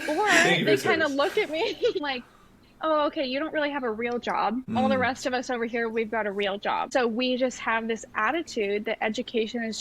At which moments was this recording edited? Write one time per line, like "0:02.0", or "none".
0:02.0
0:04.8
0:06.9